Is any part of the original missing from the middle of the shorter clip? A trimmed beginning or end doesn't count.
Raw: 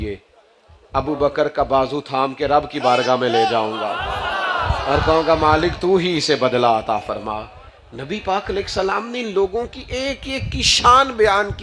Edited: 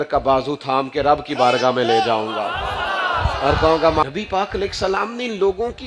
yes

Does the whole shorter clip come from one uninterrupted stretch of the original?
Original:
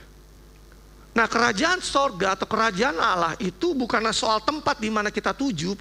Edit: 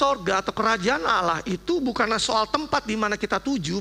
yes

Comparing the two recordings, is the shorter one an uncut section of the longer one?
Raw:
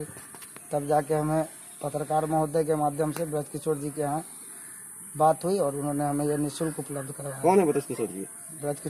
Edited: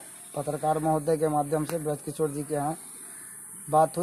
yes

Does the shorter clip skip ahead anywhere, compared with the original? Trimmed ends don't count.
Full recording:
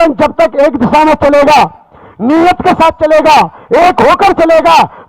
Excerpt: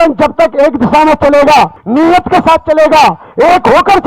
yes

